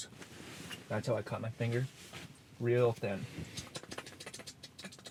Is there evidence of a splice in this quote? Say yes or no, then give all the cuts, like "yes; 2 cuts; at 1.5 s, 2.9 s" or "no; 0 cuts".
no; 0 cuts